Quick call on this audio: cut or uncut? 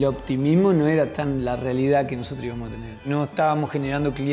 cut